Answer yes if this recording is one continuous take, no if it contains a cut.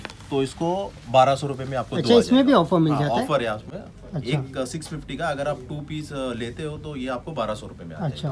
yes